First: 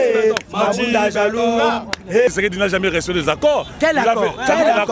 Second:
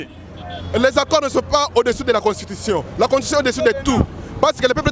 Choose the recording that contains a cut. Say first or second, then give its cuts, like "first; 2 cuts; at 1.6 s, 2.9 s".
first; 1 cut; at 2.3 s